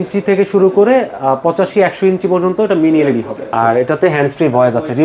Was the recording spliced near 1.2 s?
no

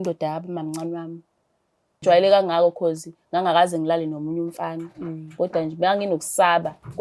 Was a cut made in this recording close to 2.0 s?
yes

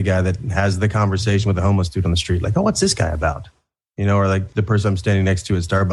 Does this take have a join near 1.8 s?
no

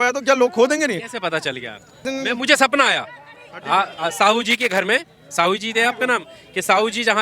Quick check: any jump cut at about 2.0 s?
yes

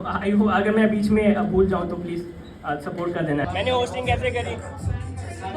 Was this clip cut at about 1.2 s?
no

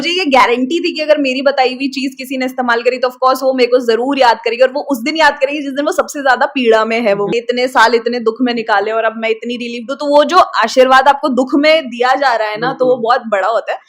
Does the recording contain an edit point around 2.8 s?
no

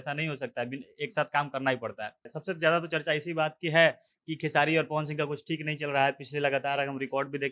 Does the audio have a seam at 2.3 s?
yes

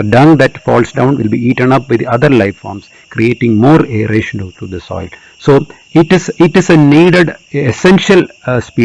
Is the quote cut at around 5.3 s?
no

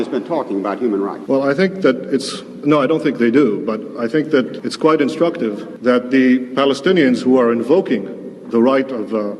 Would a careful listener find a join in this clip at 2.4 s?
no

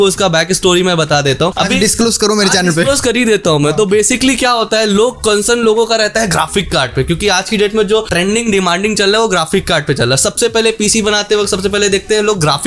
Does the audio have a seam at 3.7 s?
no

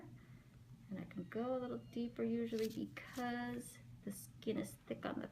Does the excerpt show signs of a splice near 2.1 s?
yes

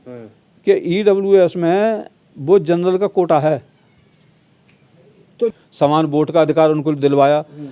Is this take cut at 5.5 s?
yes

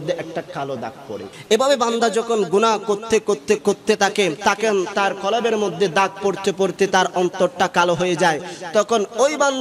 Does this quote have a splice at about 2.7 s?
no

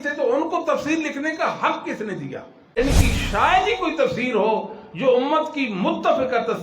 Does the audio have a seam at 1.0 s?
no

